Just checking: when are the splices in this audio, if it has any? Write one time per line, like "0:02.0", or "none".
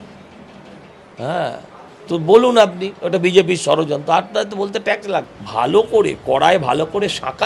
0:05.4